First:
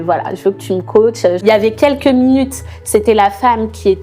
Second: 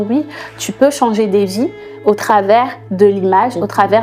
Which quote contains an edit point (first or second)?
first